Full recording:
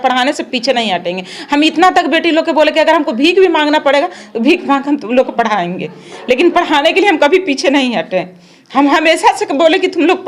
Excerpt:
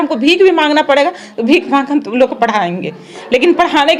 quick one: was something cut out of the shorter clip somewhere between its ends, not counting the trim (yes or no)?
no